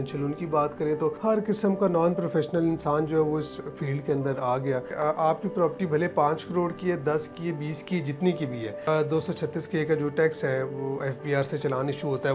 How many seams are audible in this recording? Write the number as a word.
three